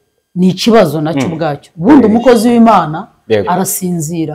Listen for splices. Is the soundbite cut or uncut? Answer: uncut